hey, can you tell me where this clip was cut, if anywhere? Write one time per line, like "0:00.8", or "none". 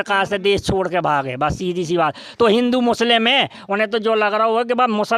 none

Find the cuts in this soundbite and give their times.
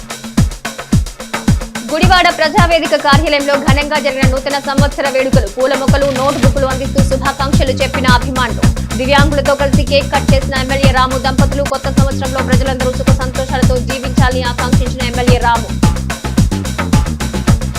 0:01.8

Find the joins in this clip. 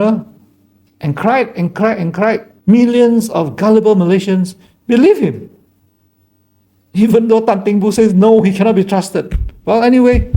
0:02.5

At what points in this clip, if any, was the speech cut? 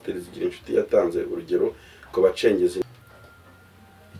0:02.8

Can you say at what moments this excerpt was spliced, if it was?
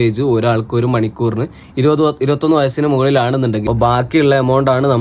0:03.6

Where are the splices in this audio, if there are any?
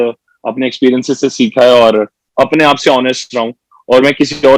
0:02.2

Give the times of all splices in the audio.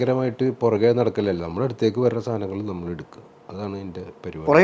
none

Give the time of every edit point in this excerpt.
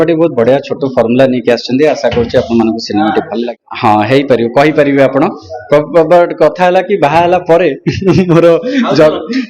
0:03.4

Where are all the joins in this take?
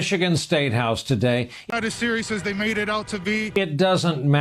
0:01.6
0:03.5

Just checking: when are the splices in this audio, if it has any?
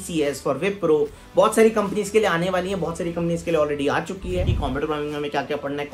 0:04.6

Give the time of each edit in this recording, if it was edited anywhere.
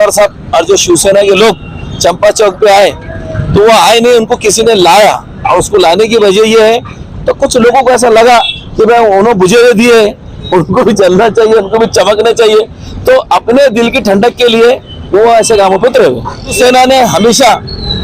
0:07.1
0:16.5

